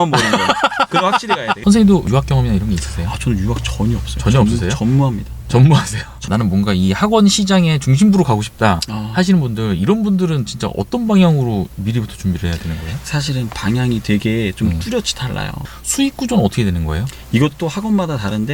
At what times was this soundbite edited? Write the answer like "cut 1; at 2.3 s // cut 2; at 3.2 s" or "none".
cut 1; at 1.6 s // cut 2; at 6.3 s // cut 3; at 15.6 s